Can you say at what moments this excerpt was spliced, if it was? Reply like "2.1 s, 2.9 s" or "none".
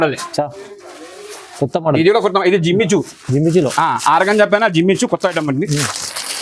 none